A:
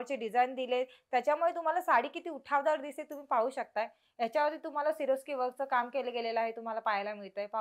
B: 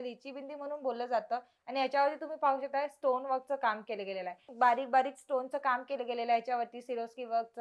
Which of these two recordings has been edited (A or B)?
B